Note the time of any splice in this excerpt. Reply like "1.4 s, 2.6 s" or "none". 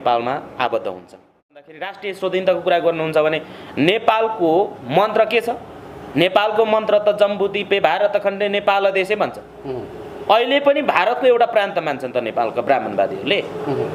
1.7 s